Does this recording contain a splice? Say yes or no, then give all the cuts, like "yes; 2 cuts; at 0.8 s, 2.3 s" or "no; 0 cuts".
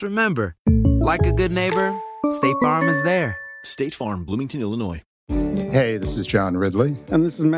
yes; 1 cut; at 5.1 s